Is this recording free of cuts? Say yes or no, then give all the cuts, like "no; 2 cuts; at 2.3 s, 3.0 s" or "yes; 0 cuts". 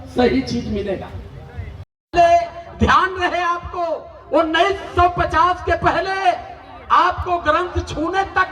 no; 1 cut; at 1.9 s